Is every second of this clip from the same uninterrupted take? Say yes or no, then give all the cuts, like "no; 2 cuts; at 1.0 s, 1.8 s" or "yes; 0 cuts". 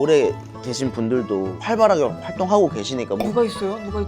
no; 1 cut; at 1.6 s